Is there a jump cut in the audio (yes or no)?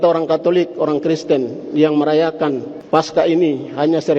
yes